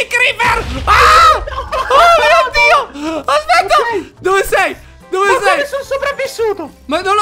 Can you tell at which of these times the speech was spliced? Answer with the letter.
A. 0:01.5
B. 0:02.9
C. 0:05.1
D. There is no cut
D